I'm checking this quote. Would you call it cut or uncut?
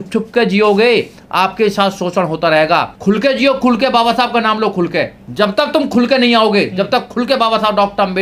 cut